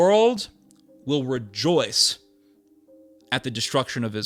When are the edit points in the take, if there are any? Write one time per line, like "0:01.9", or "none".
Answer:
none